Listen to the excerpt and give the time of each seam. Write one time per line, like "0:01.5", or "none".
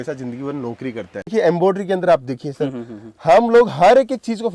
0:01.3